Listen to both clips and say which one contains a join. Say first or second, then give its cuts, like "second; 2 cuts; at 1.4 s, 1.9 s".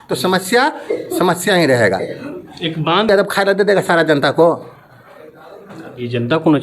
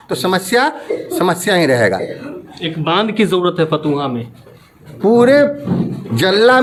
first; 1 cut; at 3.1 s